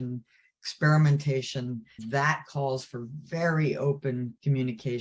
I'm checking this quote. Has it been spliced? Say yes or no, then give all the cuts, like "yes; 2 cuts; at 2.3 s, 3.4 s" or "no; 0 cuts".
yes; 1 cut; at 1.9 s